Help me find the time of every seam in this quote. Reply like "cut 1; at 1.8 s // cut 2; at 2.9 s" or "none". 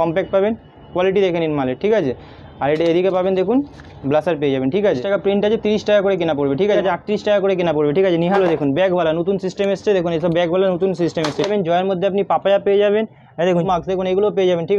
cut 1; at 5.0 s // cut 2; at 6.8 s // cut 3; at 8.4 s // cut 4; at 11.5 s // cut 5; at 13.6 s